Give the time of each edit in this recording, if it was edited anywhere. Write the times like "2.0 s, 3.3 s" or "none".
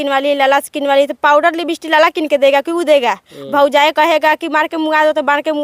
none